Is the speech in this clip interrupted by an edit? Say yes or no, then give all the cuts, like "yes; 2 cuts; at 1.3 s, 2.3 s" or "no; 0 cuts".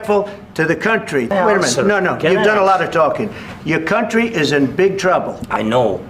yes; 1 cut; at 1.3 s